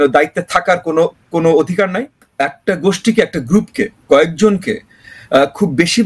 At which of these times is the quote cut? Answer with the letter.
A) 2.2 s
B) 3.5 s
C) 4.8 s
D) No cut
A